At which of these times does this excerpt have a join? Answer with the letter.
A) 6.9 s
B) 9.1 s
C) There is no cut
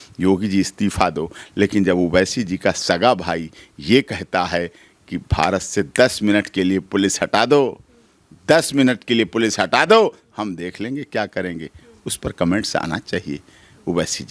C